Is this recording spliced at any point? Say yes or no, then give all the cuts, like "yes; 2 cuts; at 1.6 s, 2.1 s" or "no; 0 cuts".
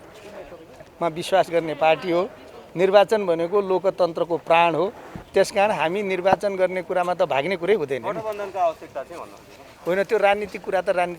no; 0 cuts